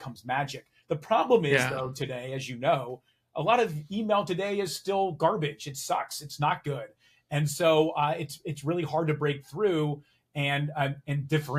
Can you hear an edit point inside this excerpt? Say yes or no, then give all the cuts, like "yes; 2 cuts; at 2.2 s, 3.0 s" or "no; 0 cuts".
no; 0 cuts